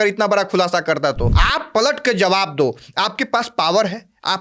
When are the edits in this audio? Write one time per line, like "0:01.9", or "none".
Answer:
0:01.4